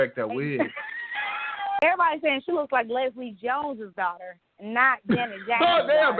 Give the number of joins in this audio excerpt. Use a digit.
1